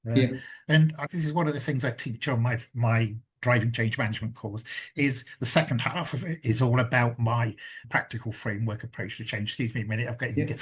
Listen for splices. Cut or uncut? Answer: uncut